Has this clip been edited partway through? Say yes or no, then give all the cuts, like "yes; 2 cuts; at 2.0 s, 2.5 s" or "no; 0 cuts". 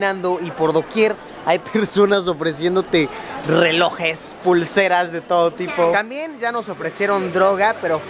no; 0 cuts